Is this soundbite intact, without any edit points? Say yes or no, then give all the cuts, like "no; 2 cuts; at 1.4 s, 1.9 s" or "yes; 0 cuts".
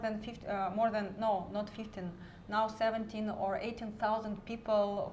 yes; 0 cuts